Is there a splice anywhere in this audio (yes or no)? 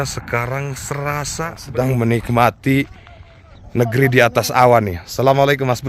yes